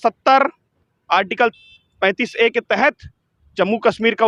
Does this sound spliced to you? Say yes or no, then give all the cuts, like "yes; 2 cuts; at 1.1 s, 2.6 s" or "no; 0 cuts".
no; 0 cuts